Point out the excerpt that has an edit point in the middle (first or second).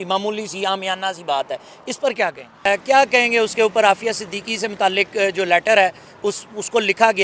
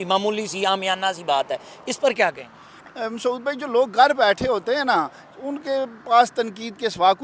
first